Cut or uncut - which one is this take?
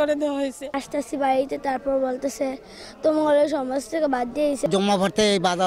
cut